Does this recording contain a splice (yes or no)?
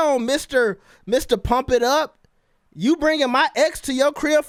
no